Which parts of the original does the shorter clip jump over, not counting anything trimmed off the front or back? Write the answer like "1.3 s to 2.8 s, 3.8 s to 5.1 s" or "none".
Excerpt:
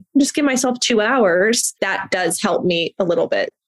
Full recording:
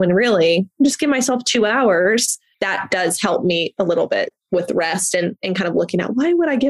2.4 s to 2.5 s